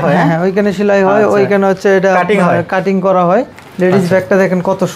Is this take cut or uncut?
cut